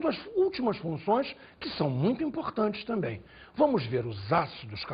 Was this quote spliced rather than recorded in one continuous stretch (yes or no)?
yes